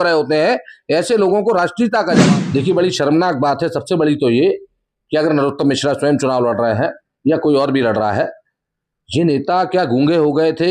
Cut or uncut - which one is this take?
cut